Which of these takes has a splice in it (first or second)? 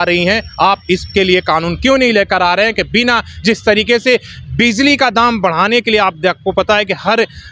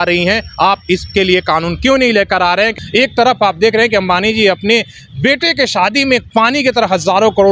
second